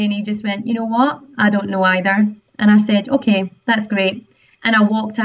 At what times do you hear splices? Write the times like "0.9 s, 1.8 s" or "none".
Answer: none

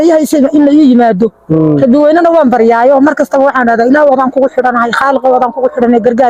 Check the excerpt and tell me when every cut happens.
none

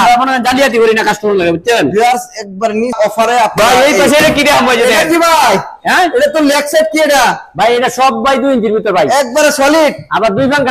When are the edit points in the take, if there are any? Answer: 2.9 s

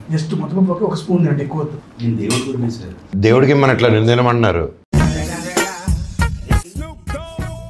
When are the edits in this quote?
2.9 s

